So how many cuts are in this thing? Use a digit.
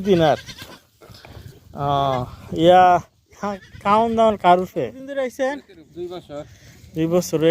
1